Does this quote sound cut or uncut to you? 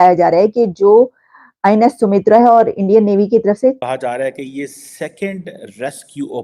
cut